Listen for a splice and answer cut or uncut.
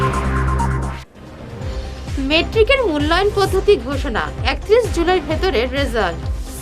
cut